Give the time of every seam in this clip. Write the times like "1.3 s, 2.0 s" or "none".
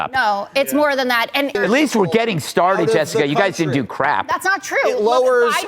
1.6 s